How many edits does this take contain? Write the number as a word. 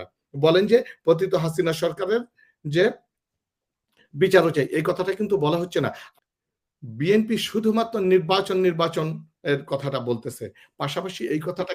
one